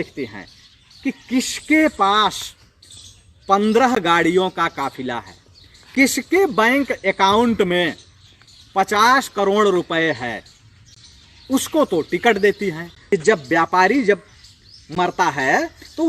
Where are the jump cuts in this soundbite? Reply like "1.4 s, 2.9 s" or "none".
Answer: 13.0 s